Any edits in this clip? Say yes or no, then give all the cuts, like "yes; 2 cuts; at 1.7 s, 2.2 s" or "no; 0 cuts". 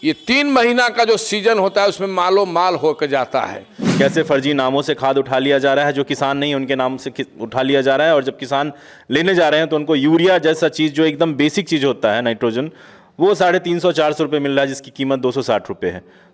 yes; 1 cut; at 3.8 s